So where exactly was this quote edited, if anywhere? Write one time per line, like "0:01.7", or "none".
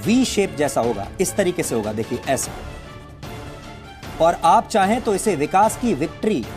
none